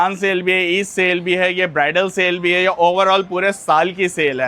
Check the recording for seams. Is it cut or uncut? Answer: uncut